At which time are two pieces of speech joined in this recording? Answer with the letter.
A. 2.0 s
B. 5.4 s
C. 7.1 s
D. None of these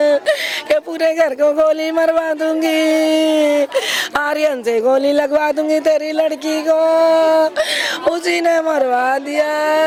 D